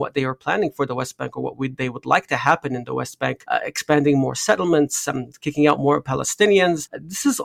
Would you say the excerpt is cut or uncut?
uncut